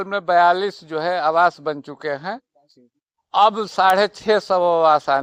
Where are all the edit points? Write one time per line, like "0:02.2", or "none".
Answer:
none